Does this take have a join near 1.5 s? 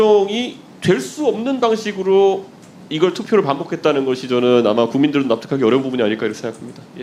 no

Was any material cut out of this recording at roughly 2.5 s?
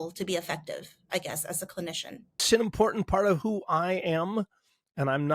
yes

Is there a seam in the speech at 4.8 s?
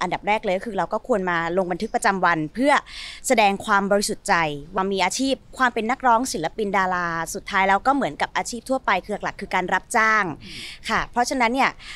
yes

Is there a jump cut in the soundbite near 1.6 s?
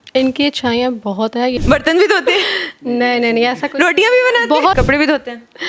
yes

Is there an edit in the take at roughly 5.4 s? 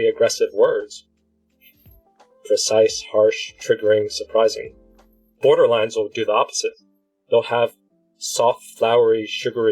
yes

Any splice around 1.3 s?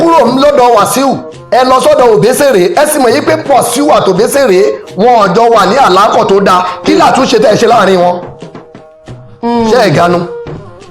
yes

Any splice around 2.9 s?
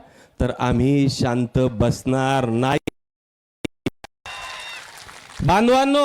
no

